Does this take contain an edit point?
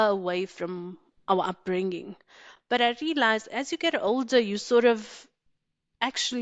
no; 0 cuts

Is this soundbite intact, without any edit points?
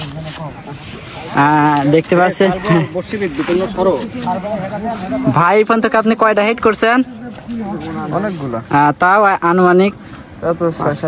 yes; 0 cuts

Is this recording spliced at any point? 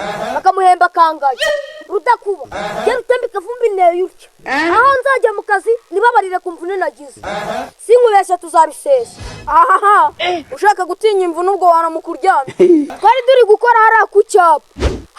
yes; 1 cut; at 12.9 s

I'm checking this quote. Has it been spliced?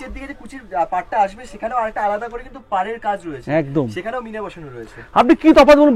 no; 0 cuts

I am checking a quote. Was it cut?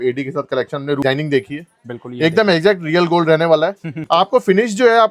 yes; 2 cuts; at 1.0 s, 3.9 s

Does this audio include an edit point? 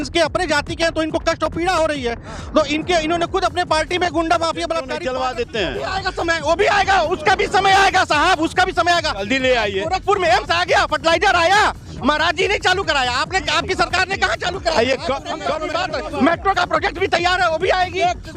yes; 2 cuts; at 4.9 s, 15.5 s

